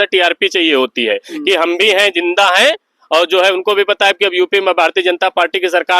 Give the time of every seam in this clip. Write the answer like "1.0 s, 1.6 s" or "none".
none

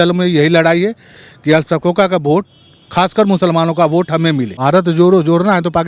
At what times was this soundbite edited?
4.5 s

